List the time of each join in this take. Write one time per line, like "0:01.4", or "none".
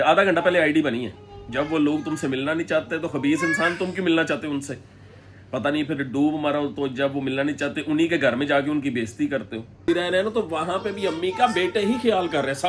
0:09.9